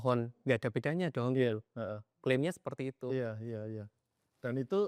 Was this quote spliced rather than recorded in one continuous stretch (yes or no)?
no